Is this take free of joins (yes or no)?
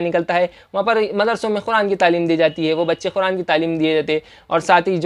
yes